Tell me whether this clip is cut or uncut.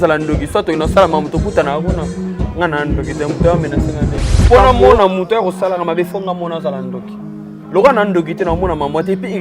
cut